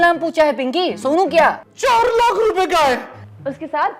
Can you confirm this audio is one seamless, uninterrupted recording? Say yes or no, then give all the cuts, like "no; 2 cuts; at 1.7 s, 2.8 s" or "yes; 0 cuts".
no; 1 cut; at 1.7 s